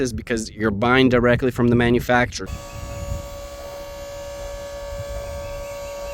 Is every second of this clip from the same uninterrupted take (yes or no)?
no